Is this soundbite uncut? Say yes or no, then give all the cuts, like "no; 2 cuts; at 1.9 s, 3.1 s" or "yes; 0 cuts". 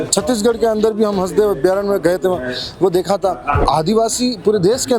no; 1 cut; at 3.5 s